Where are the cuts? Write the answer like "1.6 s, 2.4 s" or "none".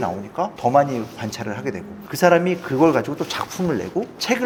none